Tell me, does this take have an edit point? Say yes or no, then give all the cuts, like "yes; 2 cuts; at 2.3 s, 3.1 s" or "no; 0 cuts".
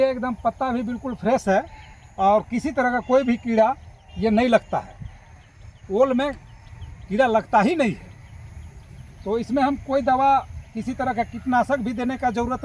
no; 0 cuts